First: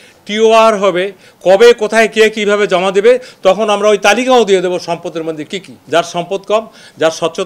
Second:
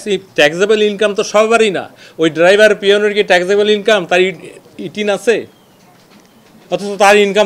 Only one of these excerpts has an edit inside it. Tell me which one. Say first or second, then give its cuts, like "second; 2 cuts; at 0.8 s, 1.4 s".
first; 1 cut; at 5.8 s